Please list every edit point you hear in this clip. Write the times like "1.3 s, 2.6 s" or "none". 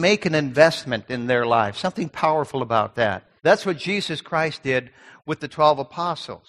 3.3 s

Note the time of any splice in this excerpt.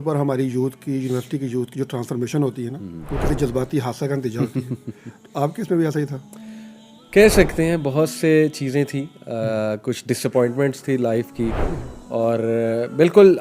none

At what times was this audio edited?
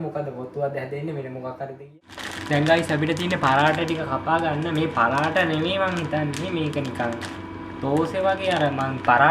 1.9 s

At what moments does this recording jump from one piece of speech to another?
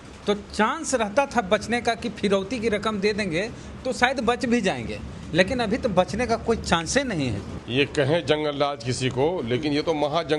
7.5 s

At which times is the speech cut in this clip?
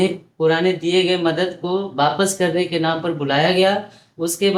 none

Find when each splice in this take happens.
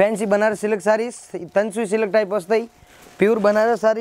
none

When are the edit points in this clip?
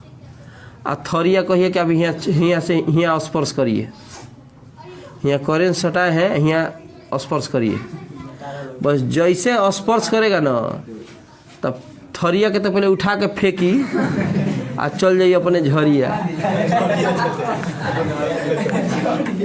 none

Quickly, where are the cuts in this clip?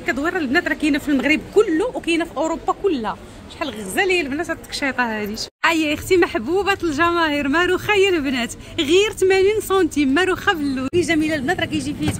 5.5 s, 10.9 s

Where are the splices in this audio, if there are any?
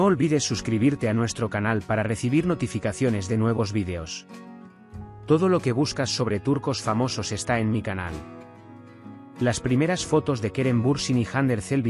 none

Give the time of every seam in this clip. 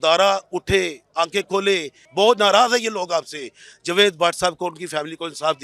2.0 s

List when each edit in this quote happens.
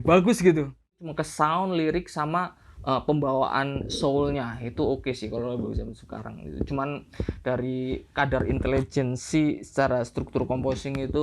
1.0 s

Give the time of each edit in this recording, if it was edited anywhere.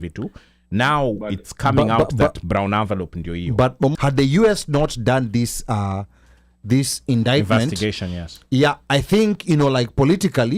3.9 s

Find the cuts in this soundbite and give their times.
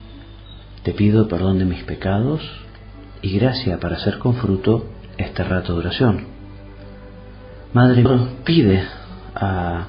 none

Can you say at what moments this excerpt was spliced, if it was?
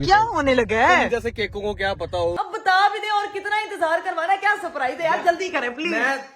2.3 s

